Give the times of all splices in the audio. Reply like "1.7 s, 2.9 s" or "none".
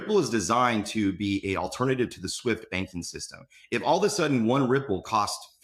none

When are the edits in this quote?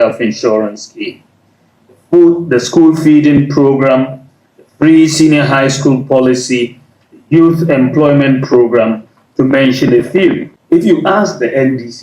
10.5 s

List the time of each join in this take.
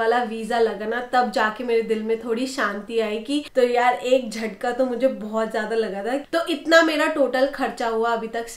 3.5 s, 6.3 s

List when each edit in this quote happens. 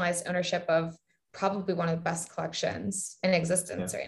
3.2 s

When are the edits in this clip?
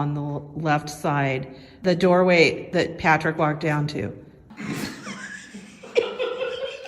1.8 s, 2.6 s, 4.4 s

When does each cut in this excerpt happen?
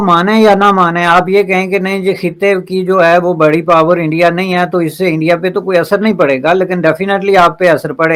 none

